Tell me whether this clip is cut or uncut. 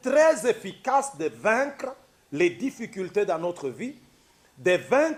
uncut